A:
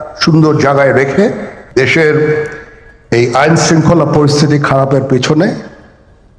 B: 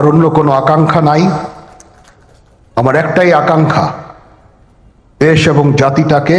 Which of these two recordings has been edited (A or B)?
A